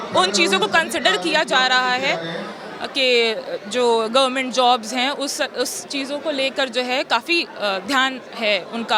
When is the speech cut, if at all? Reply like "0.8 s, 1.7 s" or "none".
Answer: none